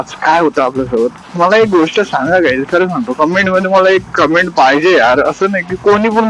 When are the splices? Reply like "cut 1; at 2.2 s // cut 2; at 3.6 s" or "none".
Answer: cut 1; at 1.2 s